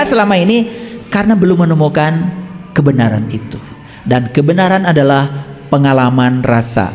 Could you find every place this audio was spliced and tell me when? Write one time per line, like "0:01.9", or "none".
none